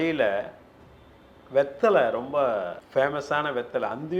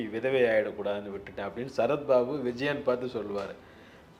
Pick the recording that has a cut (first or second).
first